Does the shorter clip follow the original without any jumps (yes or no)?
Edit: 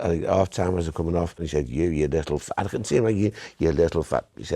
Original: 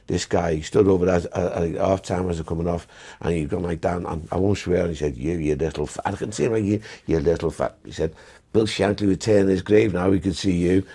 no